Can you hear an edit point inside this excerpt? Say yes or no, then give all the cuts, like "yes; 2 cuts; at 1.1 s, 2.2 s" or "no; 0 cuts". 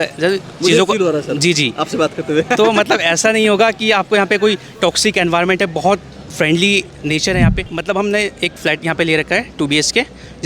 yes; 1 cut; at 7.7 s